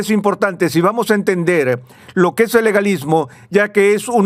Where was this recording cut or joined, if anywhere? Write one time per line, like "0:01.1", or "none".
none